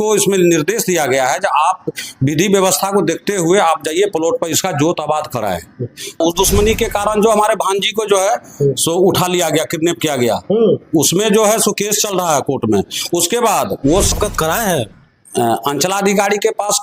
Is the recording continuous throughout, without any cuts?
no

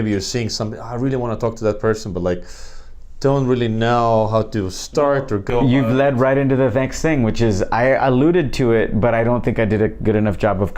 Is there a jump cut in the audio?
no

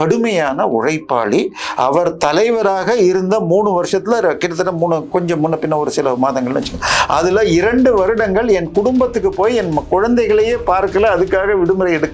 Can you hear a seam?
no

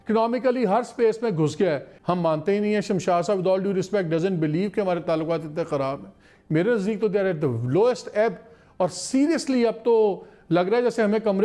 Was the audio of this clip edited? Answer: yes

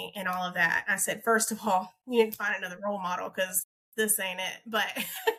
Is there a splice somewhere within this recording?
no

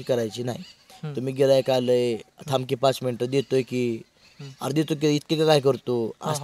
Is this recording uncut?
yes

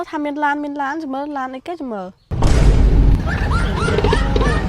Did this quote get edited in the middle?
yes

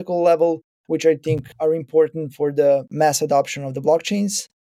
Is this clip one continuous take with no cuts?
no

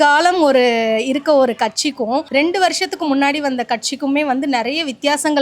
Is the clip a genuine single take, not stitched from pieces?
yes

